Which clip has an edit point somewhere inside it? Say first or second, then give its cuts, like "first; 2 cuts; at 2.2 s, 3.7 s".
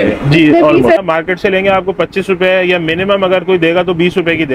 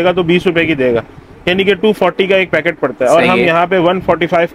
first; 1 cut; at 1.0 s